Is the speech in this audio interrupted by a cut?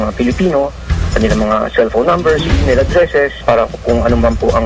yes; 1 cut; at 3.4 s

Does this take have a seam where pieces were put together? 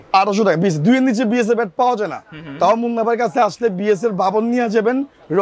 no; 0 cuts

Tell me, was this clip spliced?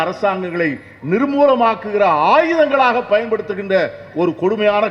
no; 0 cuts

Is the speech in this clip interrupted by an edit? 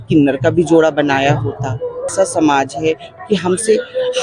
yes; 1 cut; at 2.1 s

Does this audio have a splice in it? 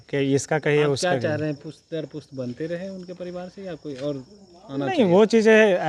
no; 0 cuts

